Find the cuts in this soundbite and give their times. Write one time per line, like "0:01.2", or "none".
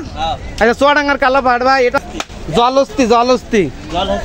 0:02.0